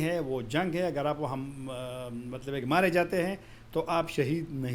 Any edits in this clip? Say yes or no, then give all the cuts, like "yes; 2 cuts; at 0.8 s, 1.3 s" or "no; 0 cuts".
no; 0 cuts